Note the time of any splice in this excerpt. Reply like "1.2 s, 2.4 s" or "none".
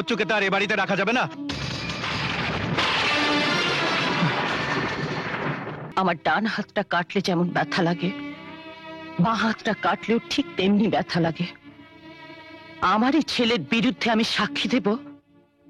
5.7 s